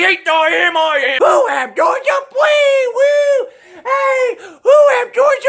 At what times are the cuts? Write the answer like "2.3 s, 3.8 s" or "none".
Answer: 1.1 s